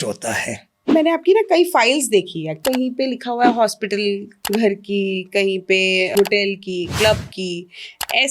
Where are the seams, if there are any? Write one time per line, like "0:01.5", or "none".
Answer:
0:00.9
0:02.6
0:04.3
0:06.1